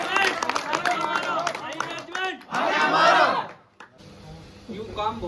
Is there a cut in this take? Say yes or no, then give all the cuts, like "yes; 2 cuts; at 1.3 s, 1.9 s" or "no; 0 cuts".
yes; 1 cut; at 4.0 s